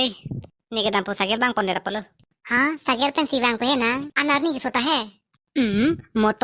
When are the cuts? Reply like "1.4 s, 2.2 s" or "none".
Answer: 4.1 s